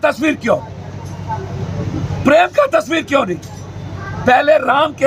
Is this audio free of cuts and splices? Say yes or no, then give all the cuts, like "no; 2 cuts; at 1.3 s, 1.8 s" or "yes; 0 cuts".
yes; 0 cuts